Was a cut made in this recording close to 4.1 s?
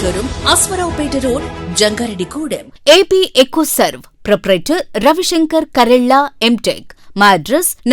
no; 1 cut; at 2.7 s

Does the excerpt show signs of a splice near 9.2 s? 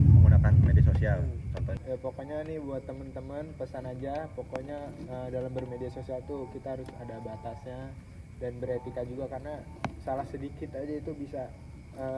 no; 1 cut; at 1.8 s

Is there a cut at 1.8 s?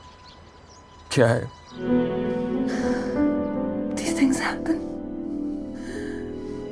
yes; 1 cut; at 1.8 s

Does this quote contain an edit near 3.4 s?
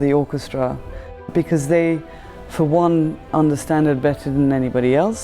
no; 1 cut; at 1.3 s

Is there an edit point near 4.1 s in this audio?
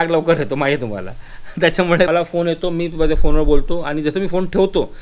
no; 1 cut; at 2.1 s

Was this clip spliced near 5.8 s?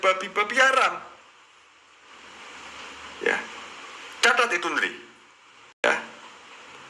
yes; 1 cut; at 5.8 s

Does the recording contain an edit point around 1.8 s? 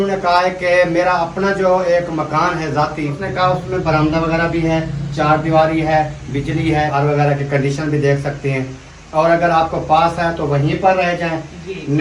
no; 2 cuts; at 3.2 s, 6.9 s

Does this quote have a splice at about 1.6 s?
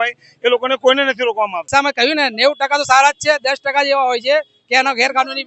yes; 1 cut; at 1.6 s

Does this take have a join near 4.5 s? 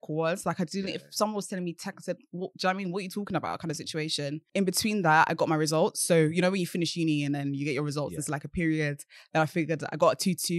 yes; 1 cut; at 4.5 s

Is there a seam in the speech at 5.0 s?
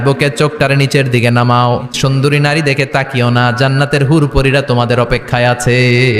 no; 1 cut; at 1.9 s

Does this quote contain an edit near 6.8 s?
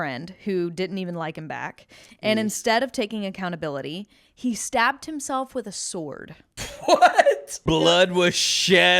yes; 2 cuts; at 6.8 s, 7.6 s

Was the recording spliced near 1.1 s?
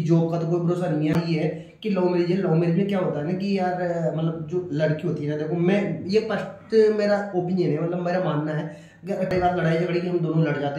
yes; 2 cuts; at 1.1 s, 9.3 s

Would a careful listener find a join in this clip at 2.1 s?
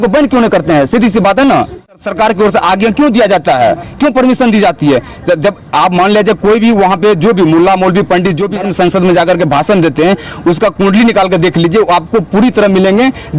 yes; 2 cuts; at 2.1 s, 8.5 s

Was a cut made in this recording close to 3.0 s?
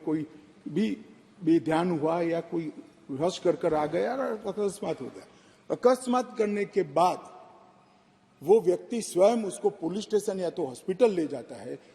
no; 0 cuts

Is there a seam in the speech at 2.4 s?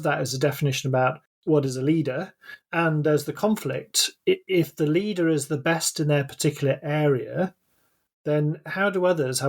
yes; 2 cuts; at 1.3 s, 2.4 s

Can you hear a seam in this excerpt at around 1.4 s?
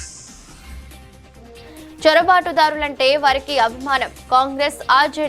yes; 1 cut; at 1.4 s

